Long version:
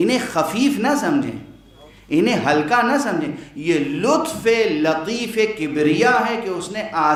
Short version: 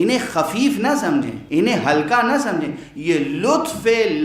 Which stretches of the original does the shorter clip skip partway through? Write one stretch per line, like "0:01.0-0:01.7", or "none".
0:01.4-0:02.0